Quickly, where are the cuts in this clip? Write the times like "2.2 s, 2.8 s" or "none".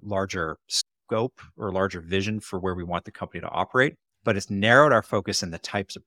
4.1 s